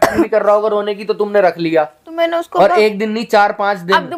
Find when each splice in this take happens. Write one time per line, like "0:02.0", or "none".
none